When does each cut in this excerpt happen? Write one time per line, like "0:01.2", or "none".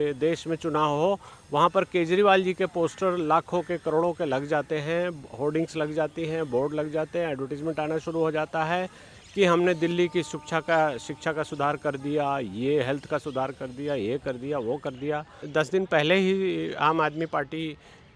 0:15.4